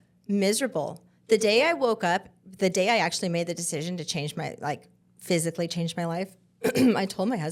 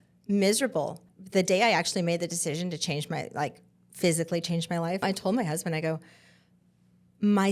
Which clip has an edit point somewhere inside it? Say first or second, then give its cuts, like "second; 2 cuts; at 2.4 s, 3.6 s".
second; 2 cuts; at 1.1 s, 5.0 s